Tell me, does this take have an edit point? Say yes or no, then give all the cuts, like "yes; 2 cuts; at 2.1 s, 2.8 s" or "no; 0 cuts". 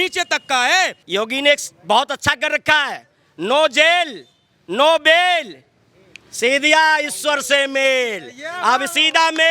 yes; 1 cut; at 1.0 s